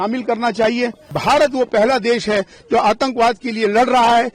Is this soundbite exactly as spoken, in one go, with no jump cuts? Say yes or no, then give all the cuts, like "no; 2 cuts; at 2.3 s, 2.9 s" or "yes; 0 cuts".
no; 1 cut; at 1.1 s